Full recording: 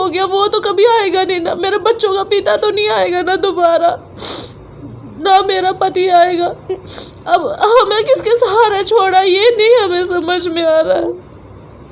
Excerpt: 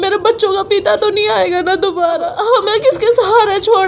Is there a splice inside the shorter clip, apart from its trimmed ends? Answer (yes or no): yes